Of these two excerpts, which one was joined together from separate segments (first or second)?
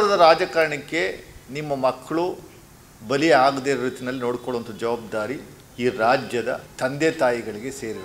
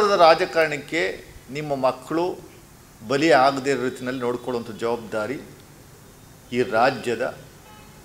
first